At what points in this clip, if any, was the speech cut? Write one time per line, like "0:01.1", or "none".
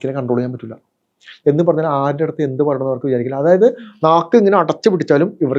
none